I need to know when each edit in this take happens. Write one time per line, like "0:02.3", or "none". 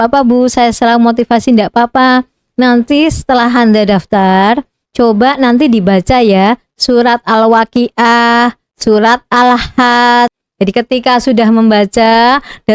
0:10.4